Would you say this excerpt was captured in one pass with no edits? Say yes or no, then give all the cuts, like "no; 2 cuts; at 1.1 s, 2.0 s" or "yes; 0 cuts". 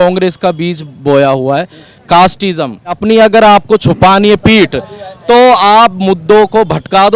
no; 1 cut; at 3.0 s